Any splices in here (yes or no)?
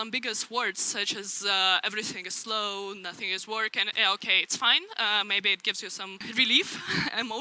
yes